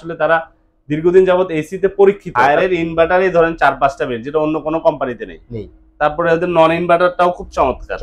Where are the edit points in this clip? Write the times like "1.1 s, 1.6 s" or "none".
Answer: 2.3 s